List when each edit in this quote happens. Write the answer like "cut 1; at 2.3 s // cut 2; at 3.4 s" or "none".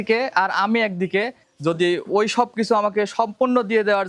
none